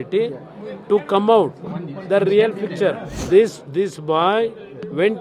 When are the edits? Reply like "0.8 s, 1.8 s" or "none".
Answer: 3.1 s